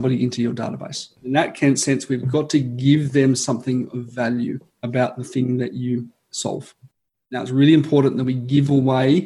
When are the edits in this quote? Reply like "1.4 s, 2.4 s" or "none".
1.1 s, 4.7 s